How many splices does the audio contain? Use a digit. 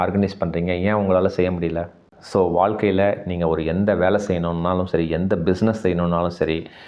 1